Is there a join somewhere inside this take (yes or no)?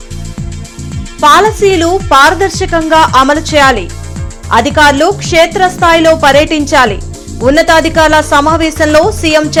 no